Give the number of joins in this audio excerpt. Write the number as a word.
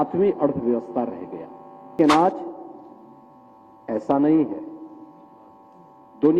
one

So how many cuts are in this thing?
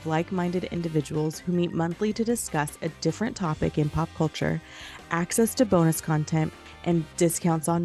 one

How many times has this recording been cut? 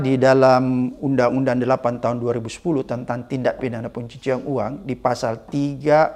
zero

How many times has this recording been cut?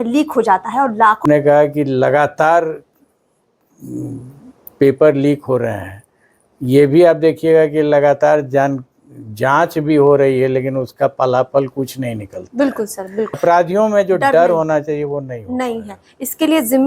two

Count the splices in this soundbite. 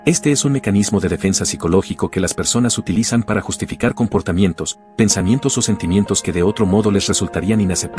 zero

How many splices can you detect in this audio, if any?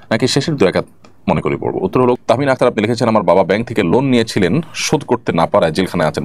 one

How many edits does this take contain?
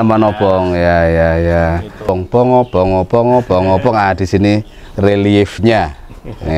one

